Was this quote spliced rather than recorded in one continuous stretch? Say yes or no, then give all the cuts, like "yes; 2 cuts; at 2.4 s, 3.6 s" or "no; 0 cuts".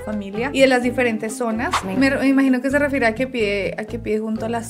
yes; 1 cut; at 1.7 s